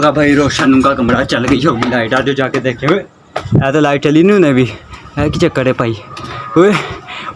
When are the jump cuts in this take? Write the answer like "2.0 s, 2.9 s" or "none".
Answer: none